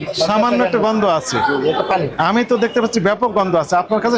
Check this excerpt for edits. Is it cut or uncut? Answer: uncut